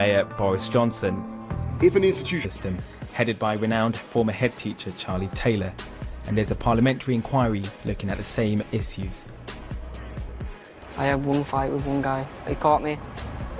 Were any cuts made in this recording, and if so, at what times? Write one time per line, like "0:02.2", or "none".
none